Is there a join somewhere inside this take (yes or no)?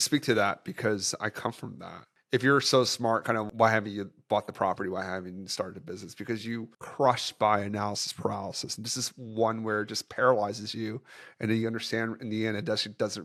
no